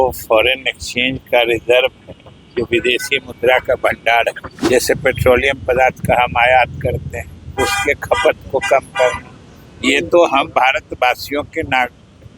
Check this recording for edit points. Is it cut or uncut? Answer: cut